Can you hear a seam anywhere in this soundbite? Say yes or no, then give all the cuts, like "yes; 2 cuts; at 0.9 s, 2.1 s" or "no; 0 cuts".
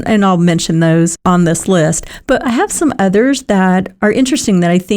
yes; 2 cuts; at 1.2 s, 3.9 s